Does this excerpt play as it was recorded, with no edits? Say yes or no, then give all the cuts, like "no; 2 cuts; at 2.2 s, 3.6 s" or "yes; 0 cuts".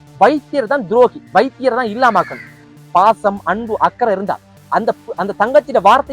no; 1 cut; at 2.6 s